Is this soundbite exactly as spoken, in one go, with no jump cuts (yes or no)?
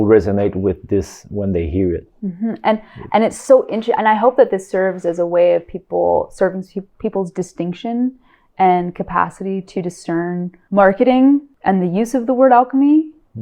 no